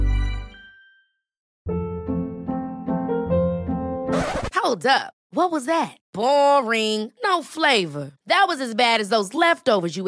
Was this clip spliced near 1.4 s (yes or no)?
yes